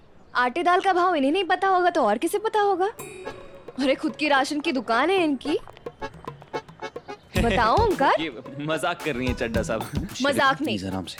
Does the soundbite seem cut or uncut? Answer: uncut